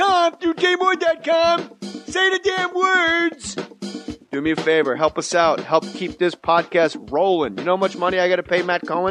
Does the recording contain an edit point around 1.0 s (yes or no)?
yes